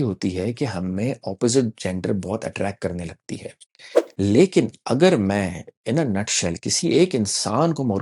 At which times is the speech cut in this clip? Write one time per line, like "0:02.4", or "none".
0:04.0